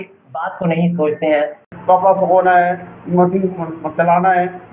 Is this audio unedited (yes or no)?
no